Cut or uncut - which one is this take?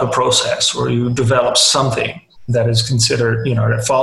cut